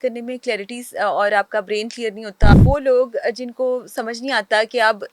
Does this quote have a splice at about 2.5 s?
yes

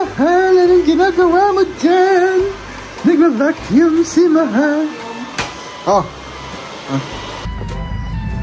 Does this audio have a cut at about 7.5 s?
yes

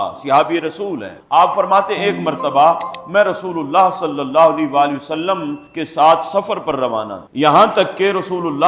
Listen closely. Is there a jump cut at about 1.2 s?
no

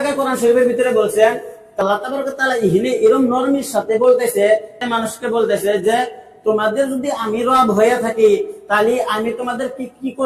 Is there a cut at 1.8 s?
yes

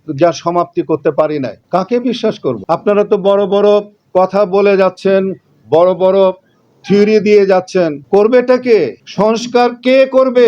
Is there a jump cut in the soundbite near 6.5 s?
no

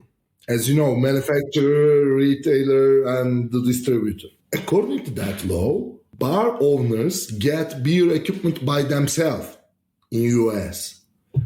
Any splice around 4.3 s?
yes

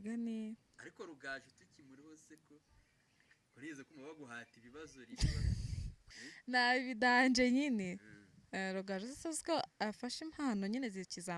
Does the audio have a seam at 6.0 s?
yes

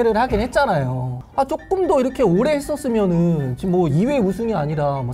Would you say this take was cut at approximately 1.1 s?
yes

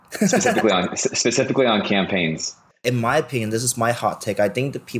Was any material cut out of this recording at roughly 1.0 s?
no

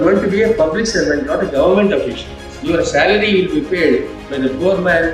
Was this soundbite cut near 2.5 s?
yes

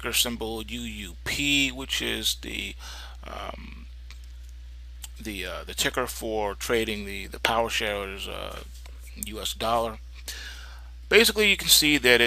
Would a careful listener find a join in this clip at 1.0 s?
yes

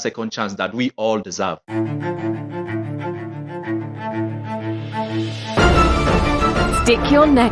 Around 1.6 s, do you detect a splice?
yes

